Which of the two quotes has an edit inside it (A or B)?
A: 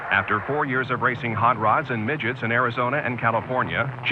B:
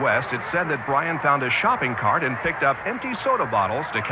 A